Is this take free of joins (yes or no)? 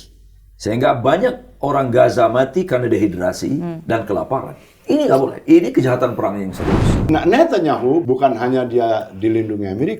no